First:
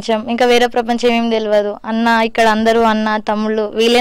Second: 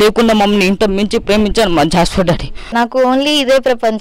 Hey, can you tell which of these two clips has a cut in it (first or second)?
second